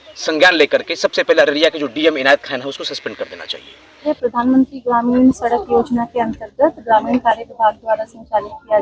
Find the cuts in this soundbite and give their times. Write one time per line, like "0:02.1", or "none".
0:04.1